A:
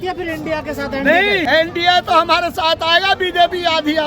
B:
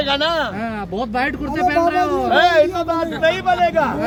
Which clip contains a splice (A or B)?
A